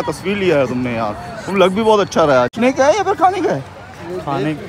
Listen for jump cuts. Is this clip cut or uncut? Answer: cut